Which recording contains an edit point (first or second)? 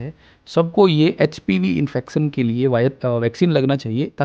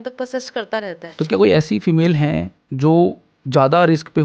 second